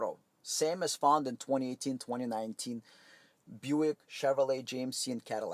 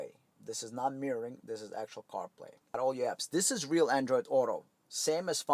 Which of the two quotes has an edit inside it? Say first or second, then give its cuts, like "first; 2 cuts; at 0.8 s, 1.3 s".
second; 1 cut; at 2.8 s